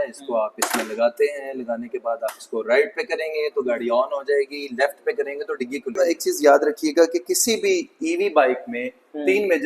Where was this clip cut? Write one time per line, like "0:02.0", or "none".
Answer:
0:05.9